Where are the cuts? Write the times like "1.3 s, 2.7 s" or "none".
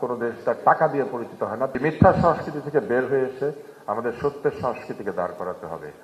1.8 s